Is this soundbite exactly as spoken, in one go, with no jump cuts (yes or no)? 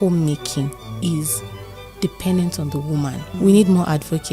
no